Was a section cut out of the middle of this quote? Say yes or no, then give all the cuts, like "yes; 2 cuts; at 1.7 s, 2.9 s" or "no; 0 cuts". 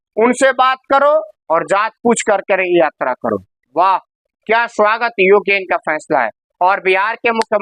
no; 0 cuts